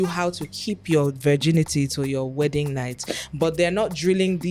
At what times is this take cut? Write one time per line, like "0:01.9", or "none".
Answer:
none